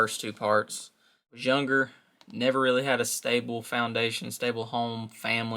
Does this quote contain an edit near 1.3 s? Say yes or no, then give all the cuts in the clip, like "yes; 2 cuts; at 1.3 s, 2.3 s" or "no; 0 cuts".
yes; 1 cut; at 1.3 s